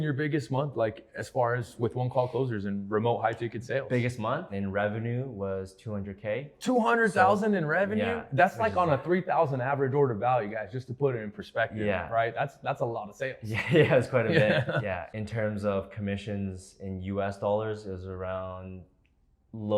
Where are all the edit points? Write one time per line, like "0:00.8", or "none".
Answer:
0:04.5
0:15.1

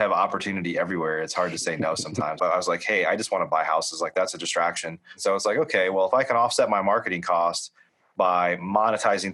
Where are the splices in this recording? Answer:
0:02.4
0:05.2

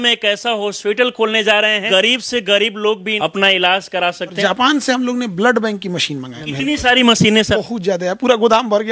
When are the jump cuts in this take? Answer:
0:01.8
0:03.1
0:04.4
0:06.4
0:07.6

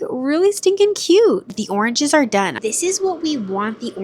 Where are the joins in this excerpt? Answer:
0:01.5
0:02.6

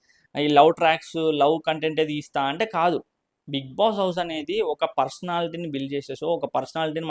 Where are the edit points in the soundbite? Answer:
none

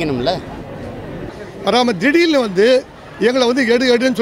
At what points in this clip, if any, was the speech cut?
0:01.4

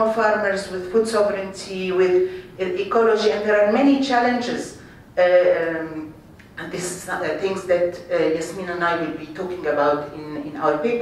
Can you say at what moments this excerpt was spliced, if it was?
0:01.3

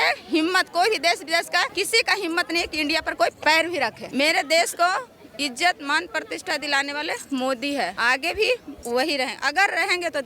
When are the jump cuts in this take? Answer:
0:01.7
0:04.0
0:08.0

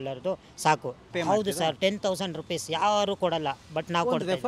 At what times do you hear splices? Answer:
0:01.1

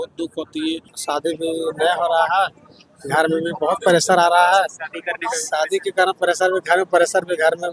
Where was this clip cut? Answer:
0:00.9

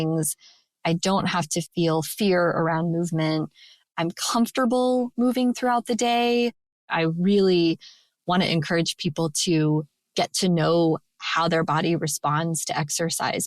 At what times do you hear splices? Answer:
0:01.7
0:05.1
0:06.8

